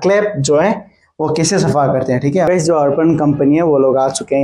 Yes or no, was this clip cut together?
yes